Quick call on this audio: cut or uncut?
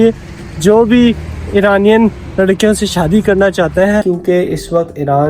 cut